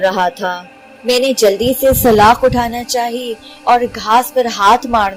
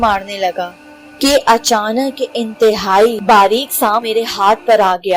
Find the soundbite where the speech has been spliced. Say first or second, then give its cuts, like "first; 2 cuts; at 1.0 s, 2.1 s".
second; 2 cuts; at 3.2 s, 4.0 s